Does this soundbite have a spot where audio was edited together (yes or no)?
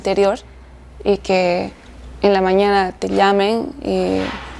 no